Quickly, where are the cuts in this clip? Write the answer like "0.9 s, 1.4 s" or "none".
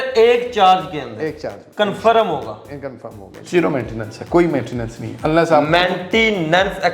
3.3 s